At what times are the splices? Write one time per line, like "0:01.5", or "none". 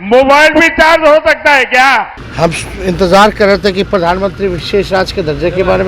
0:02.2